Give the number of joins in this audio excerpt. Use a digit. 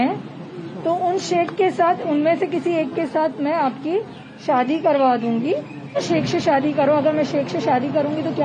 1